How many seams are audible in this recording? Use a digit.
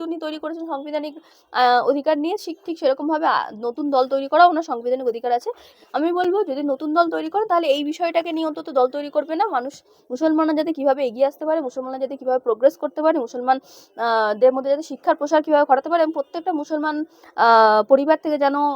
1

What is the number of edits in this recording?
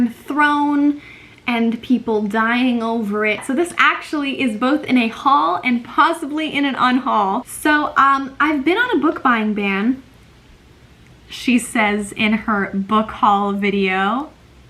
2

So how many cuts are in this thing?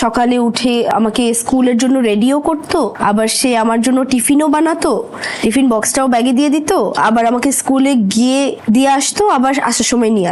3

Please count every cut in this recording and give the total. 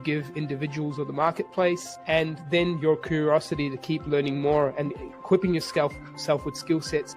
1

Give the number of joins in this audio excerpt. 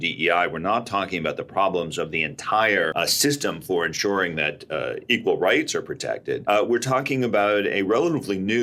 2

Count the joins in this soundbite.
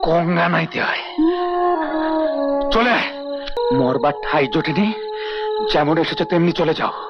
1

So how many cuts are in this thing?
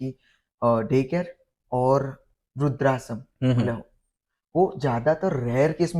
0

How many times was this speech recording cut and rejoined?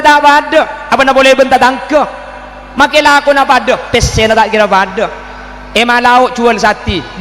0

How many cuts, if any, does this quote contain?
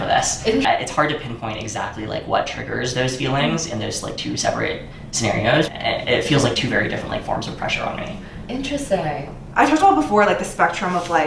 1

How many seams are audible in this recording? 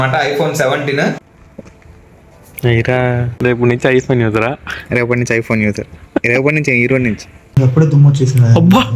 3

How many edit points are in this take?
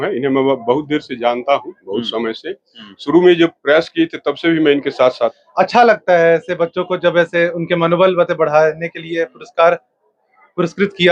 1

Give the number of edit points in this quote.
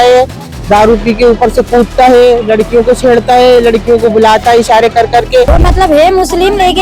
1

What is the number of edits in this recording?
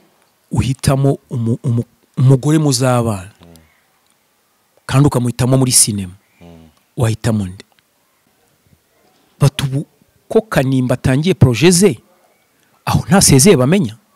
1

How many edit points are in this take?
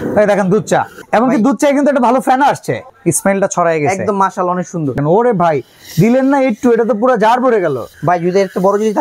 4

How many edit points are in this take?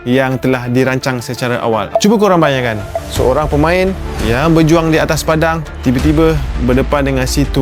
1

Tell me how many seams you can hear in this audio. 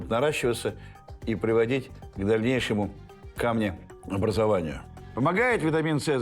1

